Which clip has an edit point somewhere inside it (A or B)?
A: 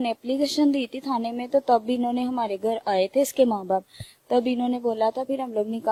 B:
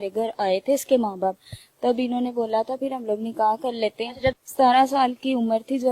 B